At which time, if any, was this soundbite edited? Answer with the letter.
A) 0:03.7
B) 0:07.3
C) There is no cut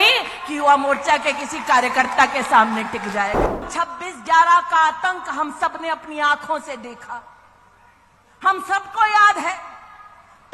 A